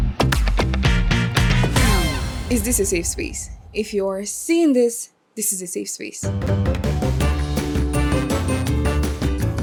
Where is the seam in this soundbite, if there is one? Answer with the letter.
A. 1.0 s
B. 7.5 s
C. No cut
C